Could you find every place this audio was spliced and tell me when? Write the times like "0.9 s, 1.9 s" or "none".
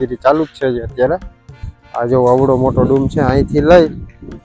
none